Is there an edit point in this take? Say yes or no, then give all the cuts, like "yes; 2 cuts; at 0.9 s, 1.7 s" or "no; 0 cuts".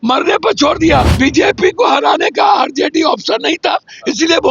yes; 1 cut; at 1.1 s